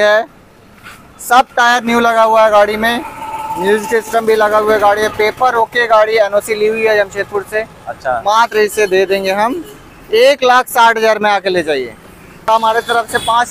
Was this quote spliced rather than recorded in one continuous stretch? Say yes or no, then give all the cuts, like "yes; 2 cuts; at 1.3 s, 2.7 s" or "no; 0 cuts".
yes; 1 cut; at 12.5 s